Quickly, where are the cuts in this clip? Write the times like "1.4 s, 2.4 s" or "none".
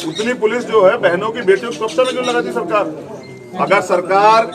3.4 s